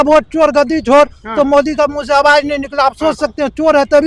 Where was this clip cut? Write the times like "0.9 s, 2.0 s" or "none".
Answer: none